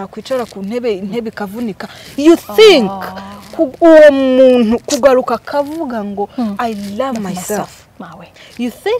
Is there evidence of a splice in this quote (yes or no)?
no